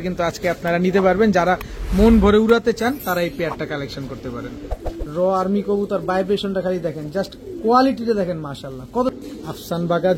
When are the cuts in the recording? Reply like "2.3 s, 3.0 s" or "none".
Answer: 4.6 s, 9.1 s